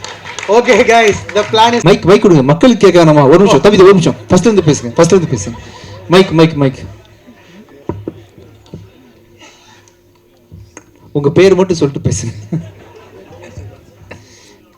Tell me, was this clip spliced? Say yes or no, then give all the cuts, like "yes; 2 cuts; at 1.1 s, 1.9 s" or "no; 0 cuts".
yes; 1 cut; at 1.8 s